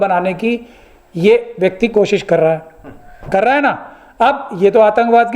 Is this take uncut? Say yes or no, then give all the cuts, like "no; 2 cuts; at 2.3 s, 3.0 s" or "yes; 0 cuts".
yes; 0 cuts